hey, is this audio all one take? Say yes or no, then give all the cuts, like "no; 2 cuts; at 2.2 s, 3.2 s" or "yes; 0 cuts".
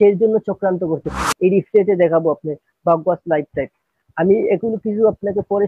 no; 1 cut; at 1.3 s